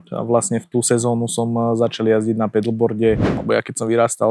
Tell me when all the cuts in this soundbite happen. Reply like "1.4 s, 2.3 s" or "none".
3.3 s